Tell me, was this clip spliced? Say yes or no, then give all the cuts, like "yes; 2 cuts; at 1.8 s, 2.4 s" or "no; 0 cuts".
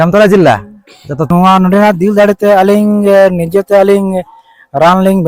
yes; 1 cut; at 1.3 s